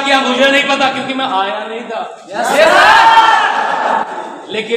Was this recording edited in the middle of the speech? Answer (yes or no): no